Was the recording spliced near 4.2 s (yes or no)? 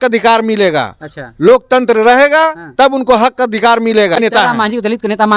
yes